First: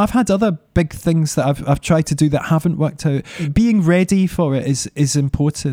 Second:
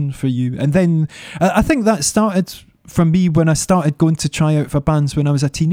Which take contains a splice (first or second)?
first